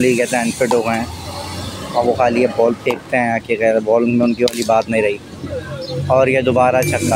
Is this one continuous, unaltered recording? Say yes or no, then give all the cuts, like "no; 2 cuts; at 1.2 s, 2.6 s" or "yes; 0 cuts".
yes; 0 cuts